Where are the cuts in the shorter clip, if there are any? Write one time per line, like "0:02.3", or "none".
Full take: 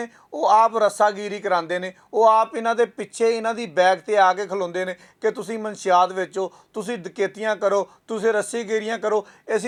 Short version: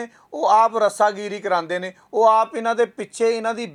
none